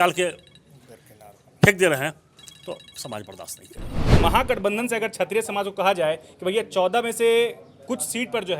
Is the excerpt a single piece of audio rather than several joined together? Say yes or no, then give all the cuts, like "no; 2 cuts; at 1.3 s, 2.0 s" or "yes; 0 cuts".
no; 1 cut; at 4.0 s